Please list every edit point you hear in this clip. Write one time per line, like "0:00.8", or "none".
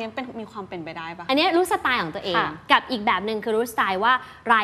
0:01.1